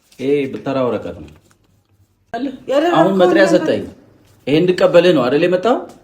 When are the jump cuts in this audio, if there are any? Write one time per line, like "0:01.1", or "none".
0:02.3